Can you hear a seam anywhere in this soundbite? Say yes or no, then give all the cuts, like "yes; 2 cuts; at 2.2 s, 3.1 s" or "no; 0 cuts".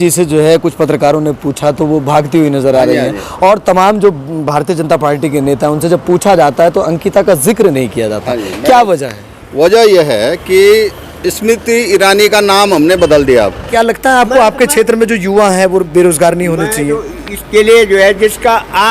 yes; 1 cut; at 13.6 s